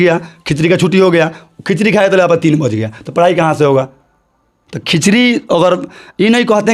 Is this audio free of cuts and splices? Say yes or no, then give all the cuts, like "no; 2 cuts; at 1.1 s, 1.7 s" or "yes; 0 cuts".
yes; 0 cuts